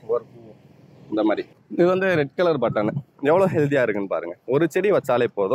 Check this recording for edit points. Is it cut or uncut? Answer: cut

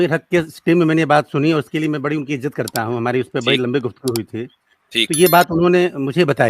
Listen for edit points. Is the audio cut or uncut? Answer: uncut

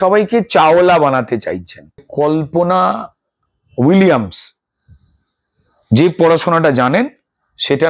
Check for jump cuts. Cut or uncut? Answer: cut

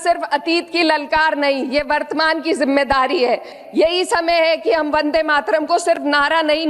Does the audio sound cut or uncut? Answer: cut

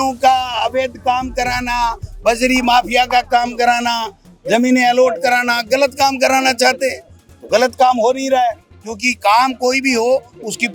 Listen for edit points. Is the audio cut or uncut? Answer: uncut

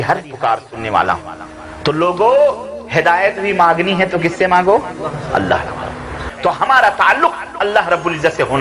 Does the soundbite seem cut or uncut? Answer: cut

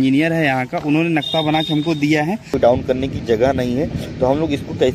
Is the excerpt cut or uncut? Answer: cut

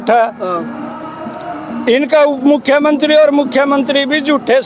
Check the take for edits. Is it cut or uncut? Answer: uncut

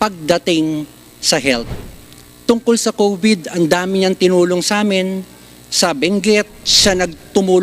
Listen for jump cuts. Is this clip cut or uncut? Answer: uncut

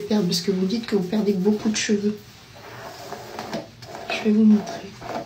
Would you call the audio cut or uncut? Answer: uncut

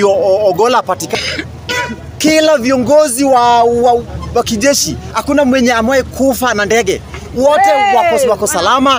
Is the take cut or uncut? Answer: cut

